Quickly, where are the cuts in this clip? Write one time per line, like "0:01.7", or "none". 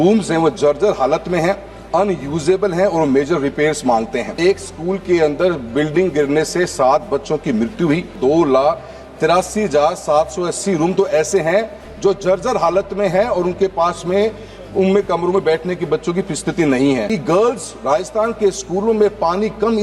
0:04.3
0:08.2
0:17.1